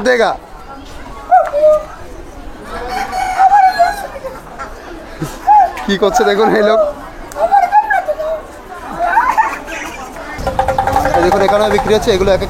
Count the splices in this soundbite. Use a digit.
1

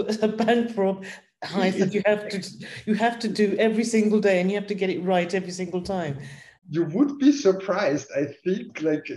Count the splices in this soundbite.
1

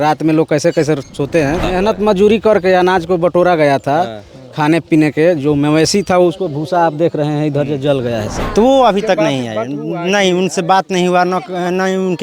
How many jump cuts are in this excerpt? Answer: 2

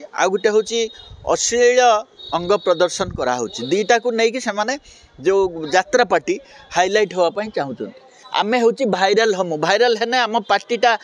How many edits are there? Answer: 1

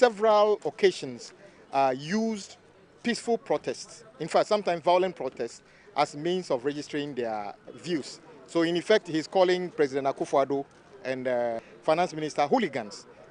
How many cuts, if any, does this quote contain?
2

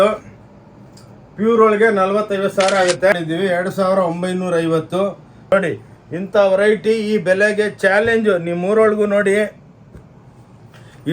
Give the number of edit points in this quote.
2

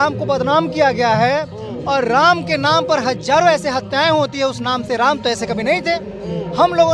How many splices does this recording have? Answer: 0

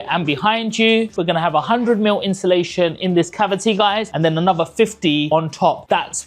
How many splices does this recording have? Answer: 1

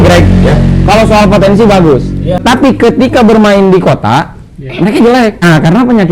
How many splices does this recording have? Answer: 2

